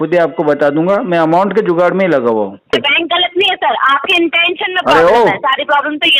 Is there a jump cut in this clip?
yes; 1 cut; at 2.7 s

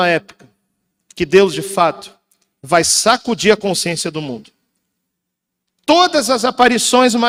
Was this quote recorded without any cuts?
yes; 0 cuts

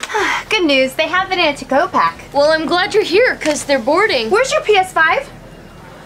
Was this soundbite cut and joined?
no; 0 cuts

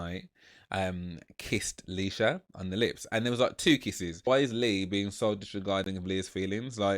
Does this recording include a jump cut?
yes; 1 cut; at 4.2 s

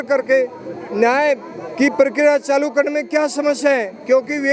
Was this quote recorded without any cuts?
yes; 0 cuts

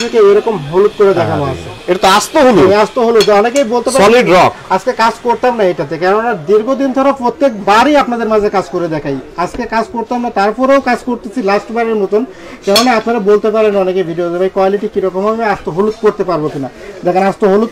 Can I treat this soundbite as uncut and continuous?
yes; 0 cuts

